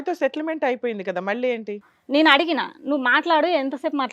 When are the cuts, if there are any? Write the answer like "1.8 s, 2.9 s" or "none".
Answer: 1.9 s